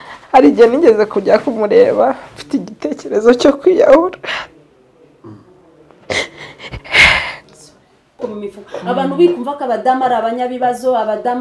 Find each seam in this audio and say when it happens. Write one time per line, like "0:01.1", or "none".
0:08.2